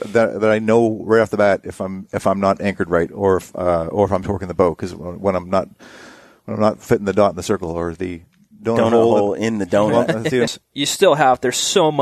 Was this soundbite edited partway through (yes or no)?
yes